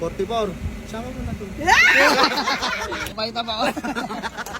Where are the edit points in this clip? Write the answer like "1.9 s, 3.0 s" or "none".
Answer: 3.1 s

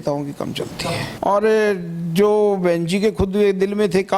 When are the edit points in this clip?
1.1 s

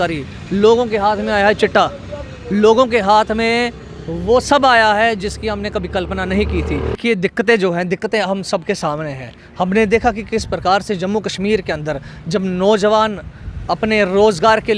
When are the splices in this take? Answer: 7.0 s

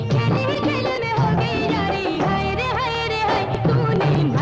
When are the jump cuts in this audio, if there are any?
none

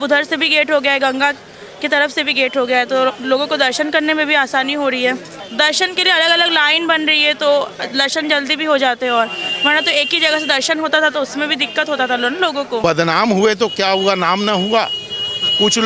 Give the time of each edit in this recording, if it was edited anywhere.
5.4 s, 12.8 s

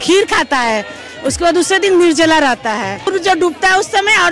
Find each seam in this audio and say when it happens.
3.1 s

